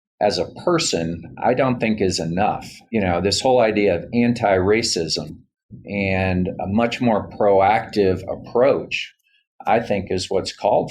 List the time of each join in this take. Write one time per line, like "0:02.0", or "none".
0:02.7